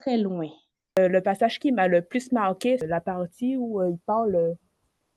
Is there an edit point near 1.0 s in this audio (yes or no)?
yes